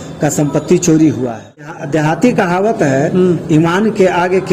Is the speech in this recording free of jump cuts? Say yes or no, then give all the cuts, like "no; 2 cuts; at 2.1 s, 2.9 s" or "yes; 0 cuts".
no; 1 cut; at 1.7 s